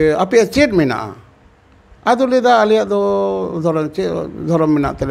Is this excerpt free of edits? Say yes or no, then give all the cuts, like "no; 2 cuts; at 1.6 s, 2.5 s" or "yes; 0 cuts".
yes; 0 cuts